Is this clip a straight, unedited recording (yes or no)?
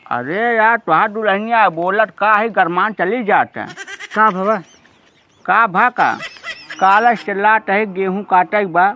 yes